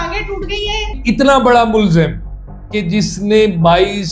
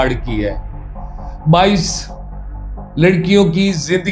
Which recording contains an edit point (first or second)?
first